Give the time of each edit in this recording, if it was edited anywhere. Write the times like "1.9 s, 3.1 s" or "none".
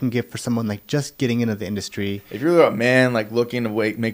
2.3 s

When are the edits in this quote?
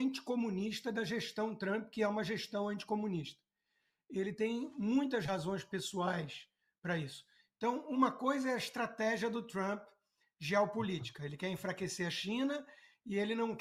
none

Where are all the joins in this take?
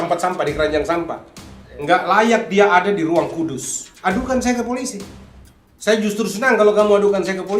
3.8 s

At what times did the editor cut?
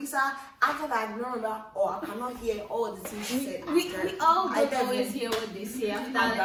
none

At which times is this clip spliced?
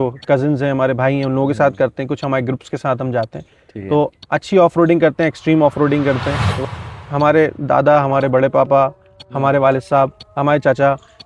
6.8 s

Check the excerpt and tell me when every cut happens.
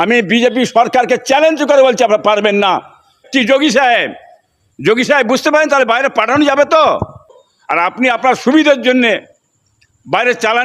3.2 s, 7.3 s

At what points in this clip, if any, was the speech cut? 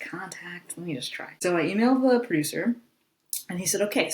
1.2 s

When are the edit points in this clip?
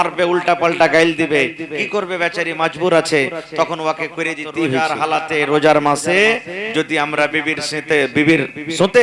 4.8 s

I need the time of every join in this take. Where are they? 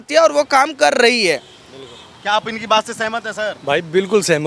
none

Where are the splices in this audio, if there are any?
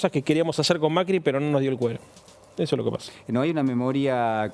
none

